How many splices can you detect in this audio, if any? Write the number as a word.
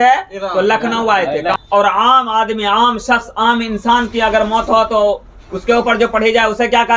one